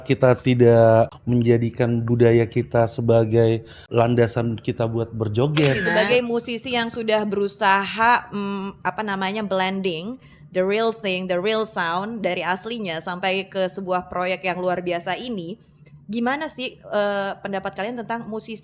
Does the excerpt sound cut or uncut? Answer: cut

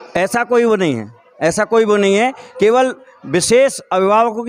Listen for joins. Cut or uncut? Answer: uncut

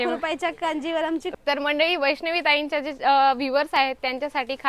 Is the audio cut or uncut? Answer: cut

